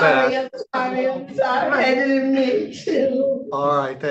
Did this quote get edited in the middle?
no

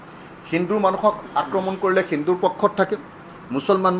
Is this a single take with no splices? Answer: yes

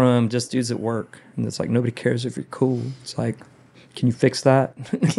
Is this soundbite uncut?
yes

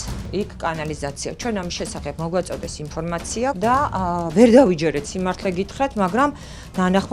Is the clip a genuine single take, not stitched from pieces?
no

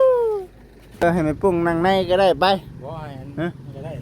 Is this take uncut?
no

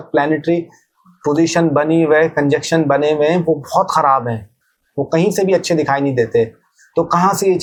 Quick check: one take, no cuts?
yes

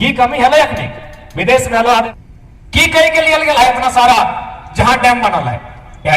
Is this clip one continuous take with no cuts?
no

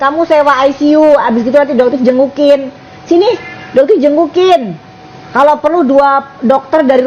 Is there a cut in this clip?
no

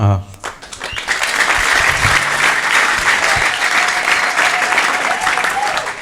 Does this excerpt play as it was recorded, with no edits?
yes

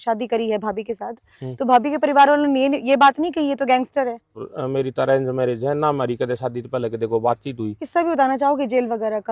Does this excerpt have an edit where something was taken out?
yes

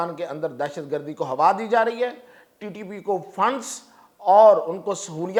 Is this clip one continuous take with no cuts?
yes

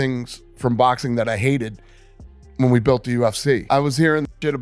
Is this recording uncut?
no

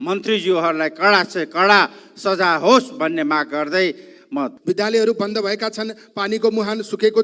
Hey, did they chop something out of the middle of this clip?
yes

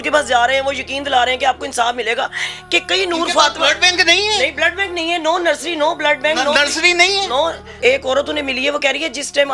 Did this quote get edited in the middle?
yes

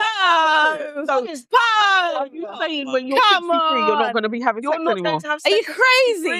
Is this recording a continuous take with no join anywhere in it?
yes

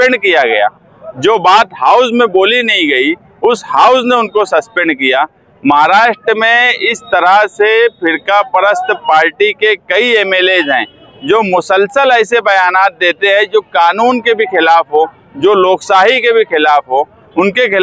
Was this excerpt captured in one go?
yes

